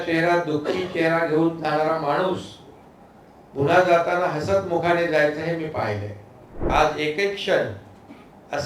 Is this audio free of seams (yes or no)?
no